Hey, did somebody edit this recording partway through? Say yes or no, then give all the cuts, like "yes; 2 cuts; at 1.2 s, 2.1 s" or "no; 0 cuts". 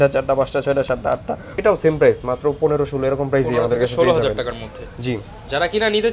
yes; 1 cut; at 1.5 s